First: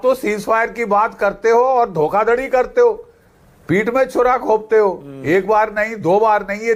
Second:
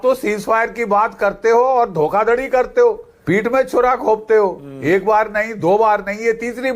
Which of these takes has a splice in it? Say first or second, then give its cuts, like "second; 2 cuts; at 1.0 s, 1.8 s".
second; 1 cut; at 3.1 s